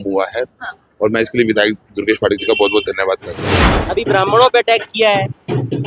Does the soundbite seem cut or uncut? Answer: cut